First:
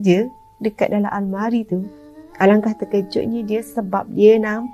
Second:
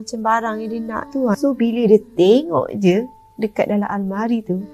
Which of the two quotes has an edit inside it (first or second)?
second